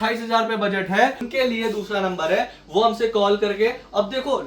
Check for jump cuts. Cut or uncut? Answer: cut